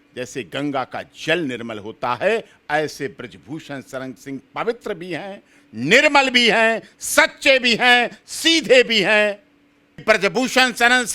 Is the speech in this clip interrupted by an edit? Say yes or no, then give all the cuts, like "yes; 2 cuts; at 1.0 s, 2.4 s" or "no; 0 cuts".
yes; 1 cut; at 10.0 s